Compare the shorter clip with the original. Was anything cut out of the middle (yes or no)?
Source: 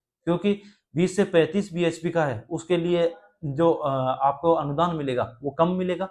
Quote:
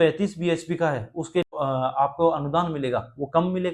yes